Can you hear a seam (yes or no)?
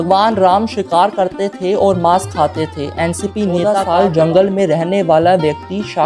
yes